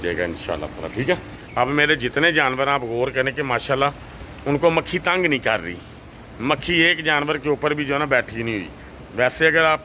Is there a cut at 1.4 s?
yes; 1 cut; at 1.4 s

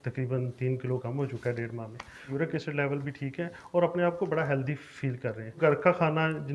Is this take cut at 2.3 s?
yes; 2 cuts; at 2.3 s, 5.6 s

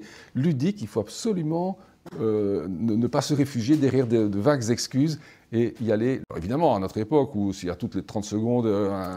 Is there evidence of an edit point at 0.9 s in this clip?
no; 1 cut; at 6.3 s

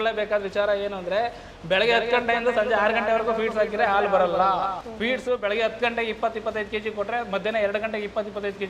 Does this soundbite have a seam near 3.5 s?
no; 0 cuts

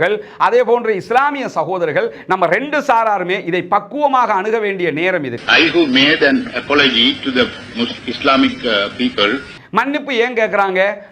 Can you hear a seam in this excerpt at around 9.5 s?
yes; 2 cuts; at 5.3 s, 9.5 s

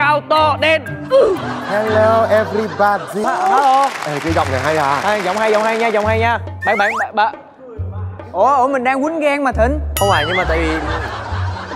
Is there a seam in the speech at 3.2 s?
yes; 1 cut; at 3.2 s

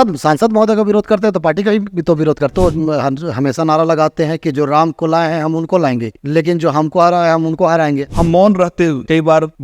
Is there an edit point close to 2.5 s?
yes; 2 cuts; at 2.5 s, 8.1 s

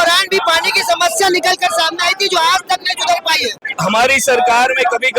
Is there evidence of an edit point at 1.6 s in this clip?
no; 1 cut; at 3.7 s

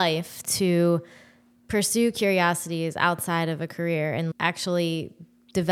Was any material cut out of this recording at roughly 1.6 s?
no; 1 cut; at 4.3 s

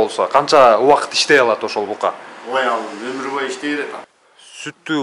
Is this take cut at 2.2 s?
no; 1 cut; at 4.1 s

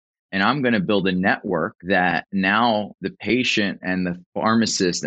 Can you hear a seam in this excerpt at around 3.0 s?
yes; 2 cuts; at 1.8 s, 3.0 s

